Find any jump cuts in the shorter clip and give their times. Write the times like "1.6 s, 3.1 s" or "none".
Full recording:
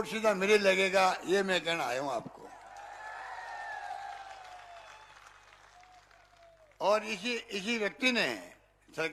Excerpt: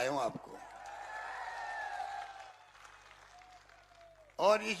2.6 s